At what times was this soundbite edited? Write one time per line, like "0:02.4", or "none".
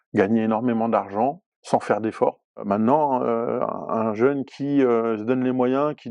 0:01.5
0:02.6